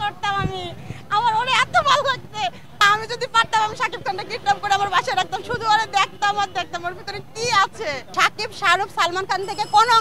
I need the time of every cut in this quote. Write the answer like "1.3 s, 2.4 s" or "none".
2.8 s, 8.0 s